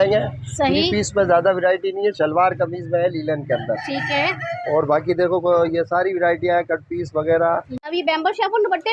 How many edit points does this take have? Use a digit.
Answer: 1